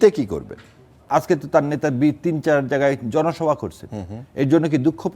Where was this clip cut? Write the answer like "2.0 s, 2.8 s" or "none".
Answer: 1.0 s